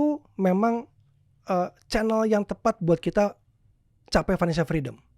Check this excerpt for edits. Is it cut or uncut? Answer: uncut